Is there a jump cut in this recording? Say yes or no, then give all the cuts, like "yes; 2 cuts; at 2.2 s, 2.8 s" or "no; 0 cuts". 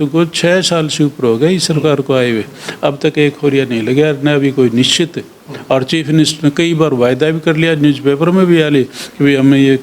no; 0 cuts